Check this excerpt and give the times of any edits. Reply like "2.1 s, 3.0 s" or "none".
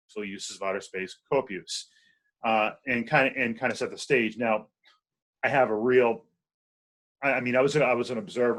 none